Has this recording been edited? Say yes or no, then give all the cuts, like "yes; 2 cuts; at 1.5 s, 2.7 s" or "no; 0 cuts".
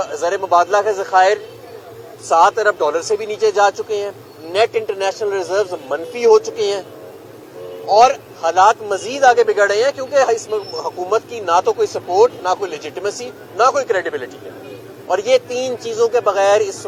no; 0 cuts